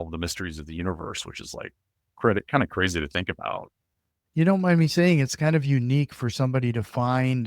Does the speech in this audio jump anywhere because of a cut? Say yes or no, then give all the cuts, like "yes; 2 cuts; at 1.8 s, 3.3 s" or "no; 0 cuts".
yes; 1 cut; at 3.8 s